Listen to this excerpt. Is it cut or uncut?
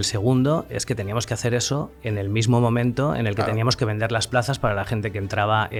uncut